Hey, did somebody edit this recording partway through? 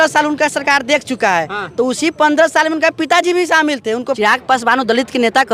yes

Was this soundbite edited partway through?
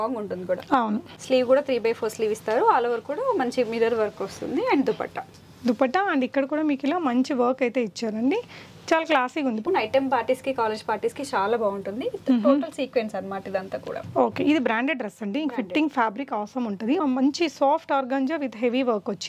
yes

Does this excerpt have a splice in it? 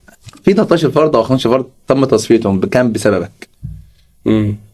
no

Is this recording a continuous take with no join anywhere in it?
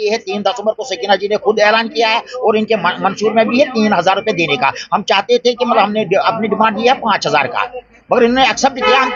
yes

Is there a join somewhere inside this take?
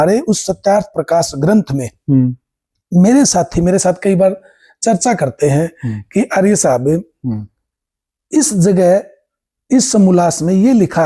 no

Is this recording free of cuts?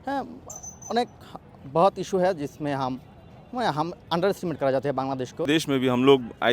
no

